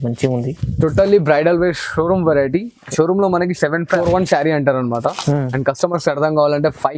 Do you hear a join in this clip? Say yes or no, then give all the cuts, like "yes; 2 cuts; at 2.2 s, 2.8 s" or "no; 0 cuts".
yes; 1 cut; at 4.0 s